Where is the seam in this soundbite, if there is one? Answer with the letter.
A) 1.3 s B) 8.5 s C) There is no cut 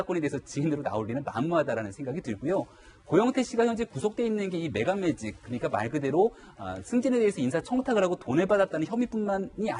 A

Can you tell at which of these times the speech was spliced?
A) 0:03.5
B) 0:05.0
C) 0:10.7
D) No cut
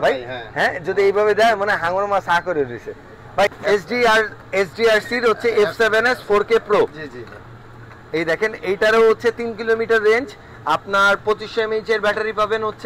A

